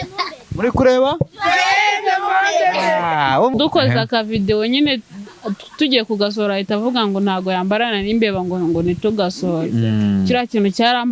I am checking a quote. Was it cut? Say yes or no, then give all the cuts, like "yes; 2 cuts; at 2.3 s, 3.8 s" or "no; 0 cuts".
yes; 1 cut; at 3.5 s